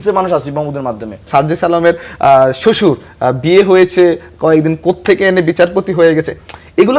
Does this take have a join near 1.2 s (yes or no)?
yes